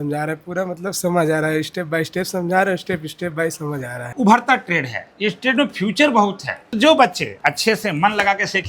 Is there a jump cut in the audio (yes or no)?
yes